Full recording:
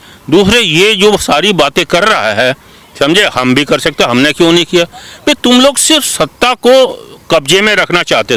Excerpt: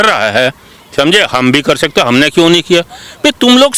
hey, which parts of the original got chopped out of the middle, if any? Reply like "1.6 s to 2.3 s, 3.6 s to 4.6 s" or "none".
none